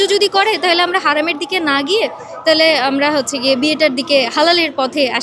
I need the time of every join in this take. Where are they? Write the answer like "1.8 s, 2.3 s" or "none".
none